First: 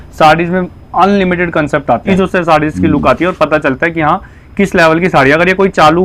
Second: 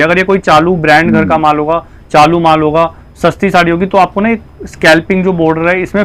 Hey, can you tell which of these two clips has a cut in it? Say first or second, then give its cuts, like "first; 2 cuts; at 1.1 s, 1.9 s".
first; 1 cut; at 2.1 s